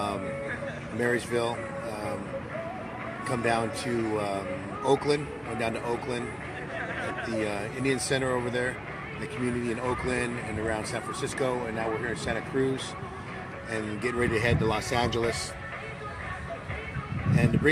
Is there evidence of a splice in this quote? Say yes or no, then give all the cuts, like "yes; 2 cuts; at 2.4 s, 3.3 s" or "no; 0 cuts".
no; 0 cuts